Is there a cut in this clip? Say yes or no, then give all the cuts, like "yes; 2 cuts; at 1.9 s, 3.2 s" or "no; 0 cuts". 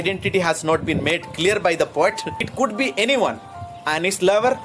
yes; 1 cut; at 2.5 s